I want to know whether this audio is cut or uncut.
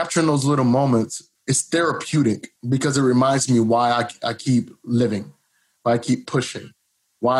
cut